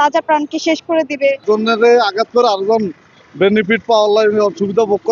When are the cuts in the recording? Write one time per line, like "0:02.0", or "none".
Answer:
0:01.4